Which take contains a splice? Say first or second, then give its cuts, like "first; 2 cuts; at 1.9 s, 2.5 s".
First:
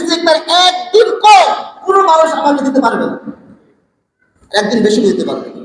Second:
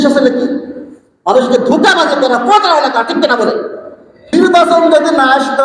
second; 1 cut; at 4.3 s